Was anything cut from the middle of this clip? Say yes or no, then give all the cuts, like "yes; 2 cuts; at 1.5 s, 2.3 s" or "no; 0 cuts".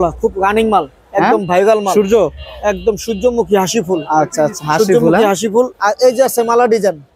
no; 0 cuts